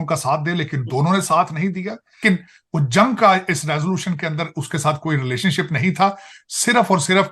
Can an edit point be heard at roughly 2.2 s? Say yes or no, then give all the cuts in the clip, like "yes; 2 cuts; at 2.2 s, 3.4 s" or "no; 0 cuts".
yes; 1 cut; at 2.2 s